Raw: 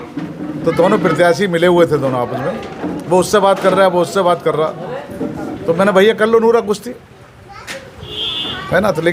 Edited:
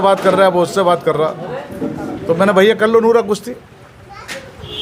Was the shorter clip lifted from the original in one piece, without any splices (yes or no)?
yes